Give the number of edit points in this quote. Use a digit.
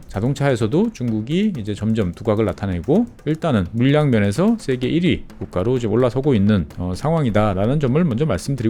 0